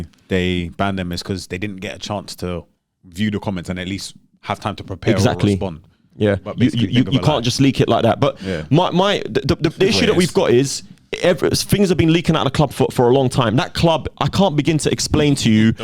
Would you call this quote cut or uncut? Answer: uncut